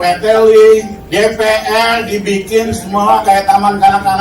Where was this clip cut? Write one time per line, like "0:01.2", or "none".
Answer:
0:01.0